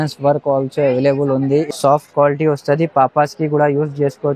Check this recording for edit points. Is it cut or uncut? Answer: cut